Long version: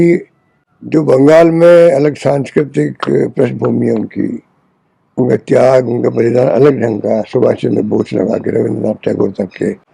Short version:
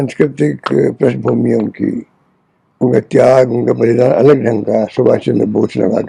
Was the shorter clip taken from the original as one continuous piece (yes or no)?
yes